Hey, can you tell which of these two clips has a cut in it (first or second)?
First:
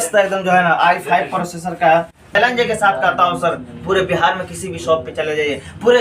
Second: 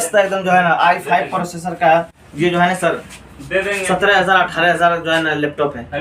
first